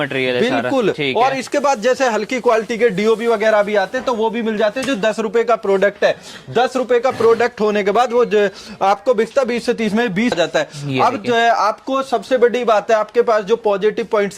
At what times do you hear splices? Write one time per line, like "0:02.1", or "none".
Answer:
0:10.3